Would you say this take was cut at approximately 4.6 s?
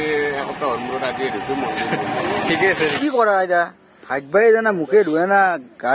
no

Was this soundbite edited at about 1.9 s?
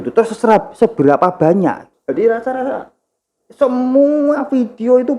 yes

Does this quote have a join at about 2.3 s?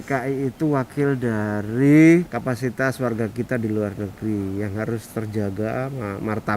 yes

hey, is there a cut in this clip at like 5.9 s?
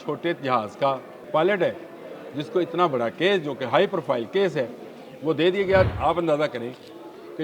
yes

